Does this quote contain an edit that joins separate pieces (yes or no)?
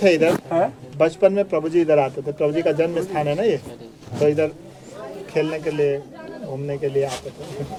no